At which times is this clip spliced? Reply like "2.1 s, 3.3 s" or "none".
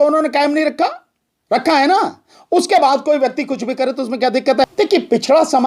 4.6 s

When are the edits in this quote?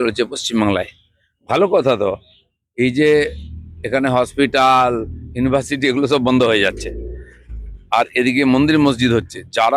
none

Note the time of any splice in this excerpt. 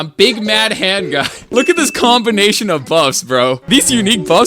1.5 s, 3.6 s

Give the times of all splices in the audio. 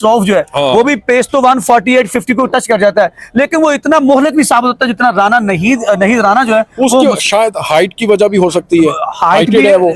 none

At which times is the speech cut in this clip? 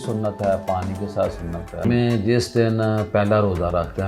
1.8 s

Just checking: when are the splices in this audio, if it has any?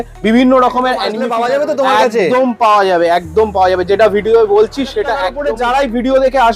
1.2 s, 5.3 s

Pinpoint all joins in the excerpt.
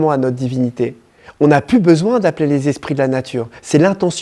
none

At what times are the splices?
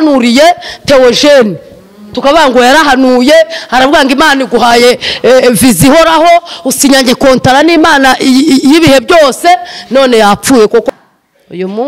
10.8 s

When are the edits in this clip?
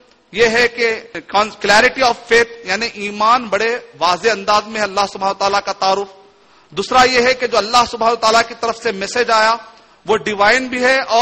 1.1 s

